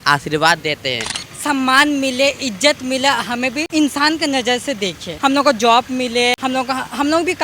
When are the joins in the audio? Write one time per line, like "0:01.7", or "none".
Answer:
0:01.1
0:03.6
0:05.1
0:06.4